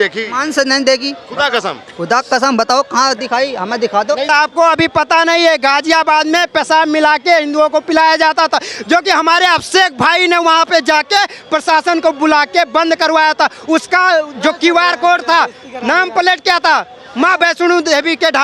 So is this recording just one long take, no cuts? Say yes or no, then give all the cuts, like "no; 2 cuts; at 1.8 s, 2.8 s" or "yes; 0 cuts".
no; 1 cut; at 4.2 s